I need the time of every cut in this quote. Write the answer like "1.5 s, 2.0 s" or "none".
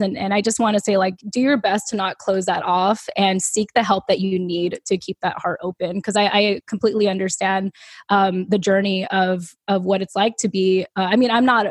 1.2 s